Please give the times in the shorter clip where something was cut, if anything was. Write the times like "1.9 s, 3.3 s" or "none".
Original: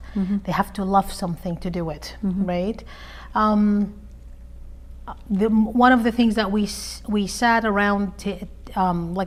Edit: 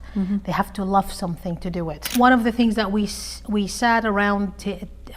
2.1 s